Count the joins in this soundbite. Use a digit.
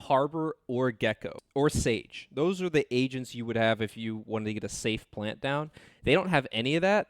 1